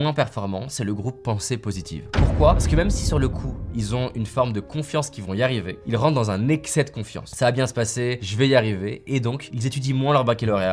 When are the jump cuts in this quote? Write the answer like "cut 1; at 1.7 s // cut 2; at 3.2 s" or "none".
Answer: cut 1; at 5.8 s